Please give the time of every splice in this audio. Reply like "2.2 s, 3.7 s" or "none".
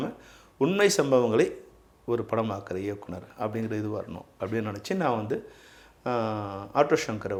none